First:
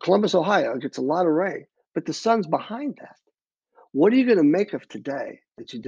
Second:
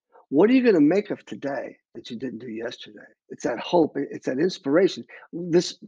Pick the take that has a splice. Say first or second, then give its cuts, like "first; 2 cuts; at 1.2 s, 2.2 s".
second; 1 cut; at 3.3 s